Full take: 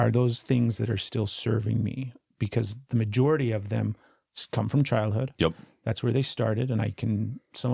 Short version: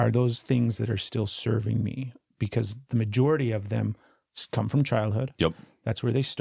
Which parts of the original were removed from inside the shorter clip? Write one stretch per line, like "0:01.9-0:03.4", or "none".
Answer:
none